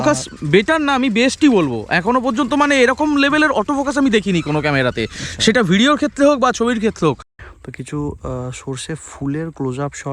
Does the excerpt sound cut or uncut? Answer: cut